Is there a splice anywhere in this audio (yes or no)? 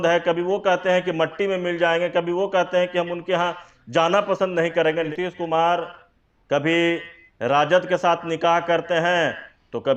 yes